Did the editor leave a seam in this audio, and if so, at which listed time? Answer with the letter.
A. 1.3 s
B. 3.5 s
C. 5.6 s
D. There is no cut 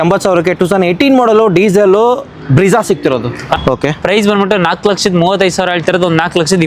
B